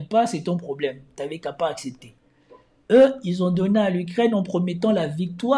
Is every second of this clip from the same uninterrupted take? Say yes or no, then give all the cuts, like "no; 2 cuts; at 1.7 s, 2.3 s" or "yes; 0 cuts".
yes; 0 cuts